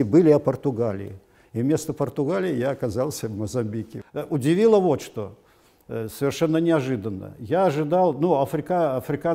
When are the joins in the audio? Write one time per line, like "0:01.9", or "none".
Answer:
none